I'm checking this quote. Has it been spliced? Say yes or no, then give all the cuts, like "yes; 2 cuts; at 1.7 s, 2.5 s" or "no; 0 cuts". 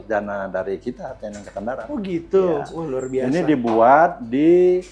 no; 0 cuts